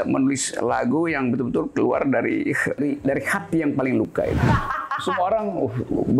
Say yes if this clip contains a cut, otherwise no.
yes